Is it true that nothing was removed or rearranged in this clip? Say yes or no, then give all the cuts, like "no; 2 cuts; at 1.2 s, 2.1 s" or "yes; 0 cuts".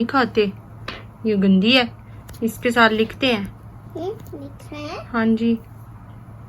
yes; 0 cuts